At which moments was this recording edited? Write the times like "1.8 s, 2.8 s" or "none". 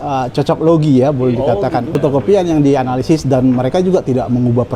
1.9 s